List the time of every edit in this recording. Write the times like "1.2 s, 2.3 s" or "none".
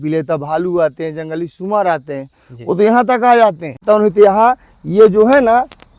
3.8 s